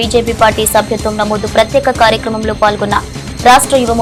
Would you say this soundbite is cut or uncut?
uncut